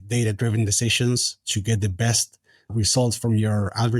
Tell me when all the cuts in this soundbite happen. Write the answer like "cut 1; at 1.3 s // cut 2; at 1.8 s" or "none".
cut 1; at 2.7 s